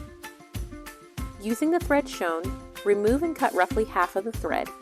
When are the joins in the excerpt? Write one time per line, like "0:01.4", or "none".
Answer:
0:01.4